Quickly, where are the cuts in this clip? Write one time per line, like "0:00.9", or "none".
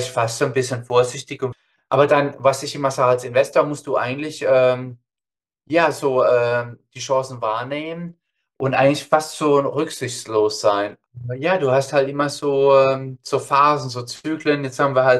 0:01.4
0:11.0